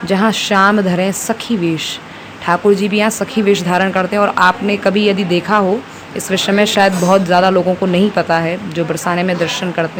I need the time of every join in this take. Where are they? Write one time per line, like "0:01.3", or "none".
none

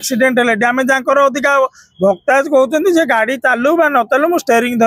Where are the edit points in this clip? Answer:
none

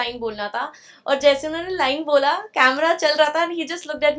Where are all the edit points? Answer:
none

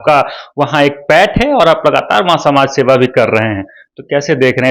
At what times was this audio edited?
none

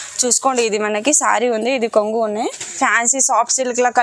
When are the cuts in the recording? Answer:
0:02.7

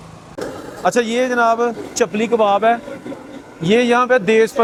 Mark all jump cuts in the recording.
none

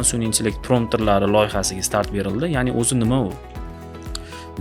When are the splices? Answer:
none

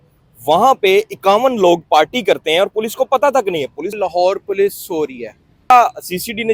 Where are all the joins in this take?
0:03.9
0:05.7

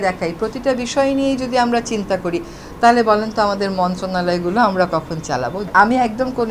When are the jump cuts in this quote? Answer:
0:05.6

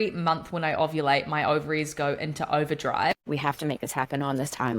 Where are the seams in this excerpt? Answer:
0:03.2

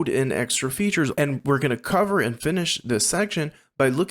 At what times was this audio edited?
0:01.2

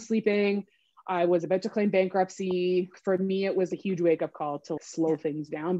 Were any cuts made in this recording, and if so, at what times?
0:02.9
0:04.8

